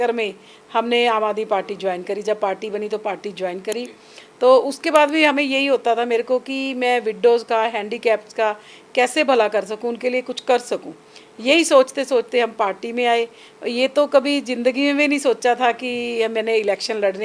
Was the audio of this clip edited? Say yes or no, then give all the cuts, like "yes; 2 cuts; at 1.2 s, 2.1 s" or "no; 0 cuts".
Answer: no; 0 cuts